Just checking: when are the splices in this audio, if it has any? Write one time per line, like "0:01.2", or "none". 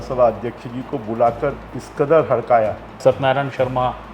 0:03.0